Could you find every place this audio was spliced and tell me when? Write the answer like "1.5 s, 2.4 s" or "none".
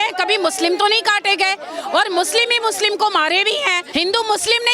3.8 s